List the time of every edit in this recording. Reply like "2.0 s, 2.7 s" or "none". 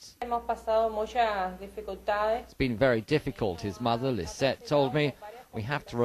4.4 s